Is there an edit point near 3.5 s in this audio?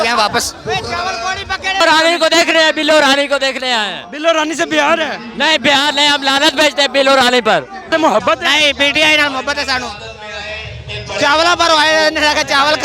no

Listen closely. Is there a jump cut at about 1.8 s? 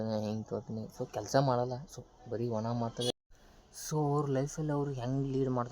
no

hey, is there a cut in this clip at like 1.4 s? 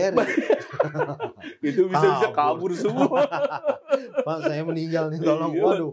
no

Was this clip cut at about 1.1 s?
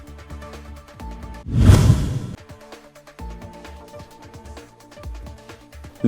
no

